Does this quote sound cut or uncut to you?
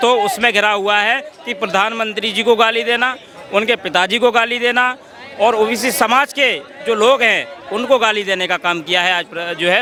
uncut